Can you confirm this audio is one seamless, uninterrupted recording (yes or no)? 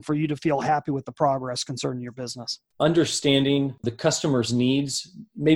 no